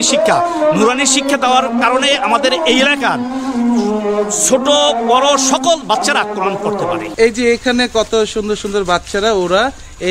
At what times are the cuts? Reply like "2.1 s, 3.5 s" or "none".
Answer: 7.1 s